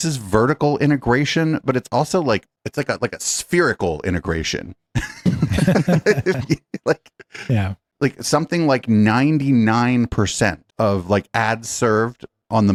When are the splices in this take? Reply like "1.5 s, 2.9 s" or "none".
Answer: none